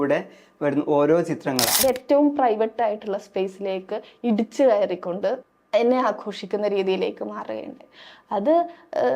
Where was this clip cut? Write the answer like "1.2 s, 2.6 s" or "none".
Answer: 1.7 s, 5.5 s